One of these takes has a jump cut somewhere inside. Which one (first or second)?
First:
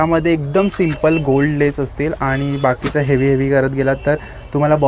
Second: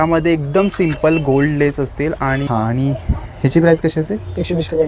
second